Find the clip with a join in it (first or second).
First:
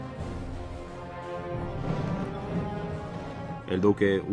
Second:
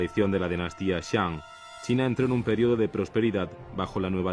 first